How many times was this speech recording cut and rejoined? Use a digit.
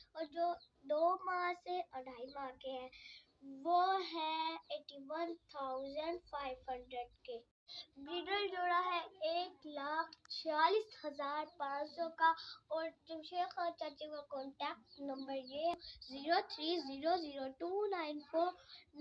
1